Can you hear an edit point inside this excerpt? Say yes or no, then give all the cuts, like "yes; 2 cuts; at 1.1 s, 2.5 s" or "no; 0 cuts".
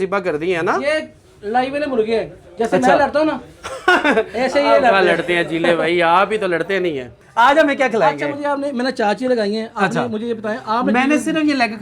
no; 0 cuts